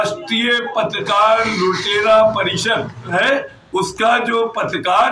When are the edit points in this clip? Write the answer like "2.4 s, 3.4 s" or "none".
3.1 s